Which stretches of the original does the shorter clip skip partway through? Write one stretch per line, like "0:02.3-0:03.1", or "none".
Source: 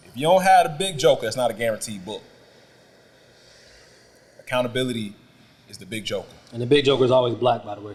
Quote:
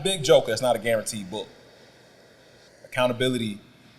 0:03.4-0:04.2